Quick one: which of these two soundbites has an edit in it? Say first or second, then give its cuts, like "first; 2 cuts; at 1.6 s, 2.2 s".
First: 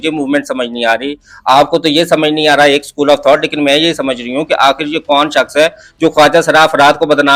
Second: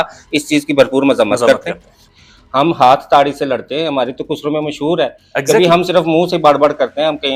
second; 1 cut; at 1.9 s